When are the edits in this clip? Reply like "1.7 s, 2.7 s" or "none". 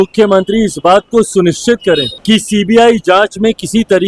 2.1 s